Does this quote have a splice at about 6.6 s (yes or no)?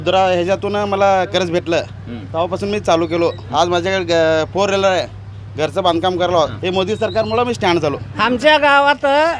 yes